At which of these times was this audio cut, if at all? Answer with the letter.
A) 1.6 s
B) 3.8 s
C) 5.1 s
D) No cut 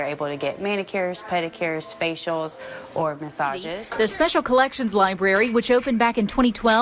B